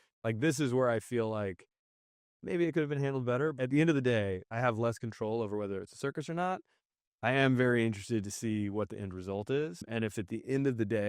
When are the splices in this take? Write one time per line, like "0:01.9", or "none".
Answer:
0:03.5
0:04.4
0:09.8